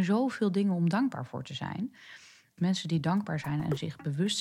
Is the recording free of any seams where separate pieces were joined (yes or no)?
no